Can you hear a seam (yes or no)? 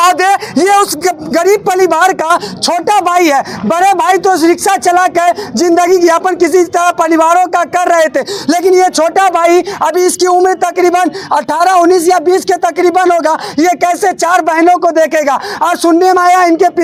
no